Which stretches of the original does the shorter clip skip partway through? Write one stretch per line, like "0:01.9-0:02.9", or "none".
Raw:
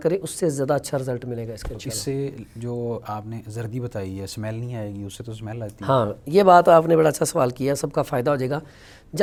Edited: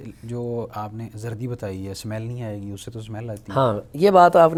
none